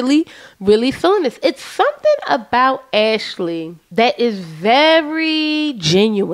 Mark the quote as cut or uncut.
cut